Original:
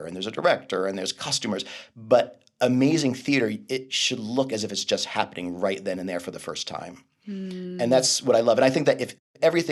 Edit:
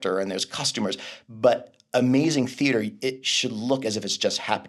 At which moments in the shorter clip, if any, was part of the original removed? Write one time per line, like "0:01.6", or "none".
none